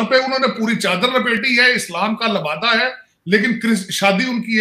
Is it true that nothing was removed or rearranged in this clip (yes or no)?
yes